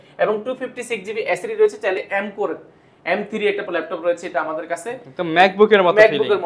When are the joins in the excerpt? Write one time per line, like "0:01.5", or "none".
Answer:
0:02.0